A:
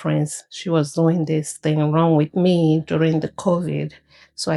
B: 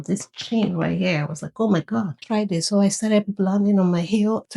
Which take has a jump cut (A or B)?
B